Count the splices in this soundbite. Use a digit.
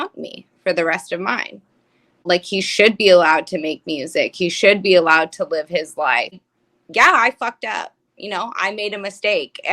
2